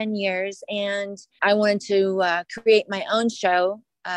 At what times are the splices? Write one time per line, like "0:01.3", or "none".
0:01.3